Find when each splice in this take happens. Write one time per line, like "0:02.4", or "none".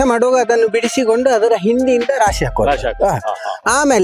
none